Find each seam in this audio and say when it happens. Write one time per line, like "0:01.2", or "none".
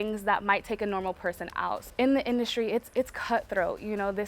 0:01.9